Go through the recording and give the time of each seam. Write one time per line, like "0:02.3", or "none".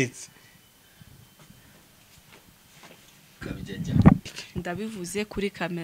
0:04.4